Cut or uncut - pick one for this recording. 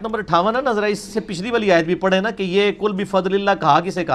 uncut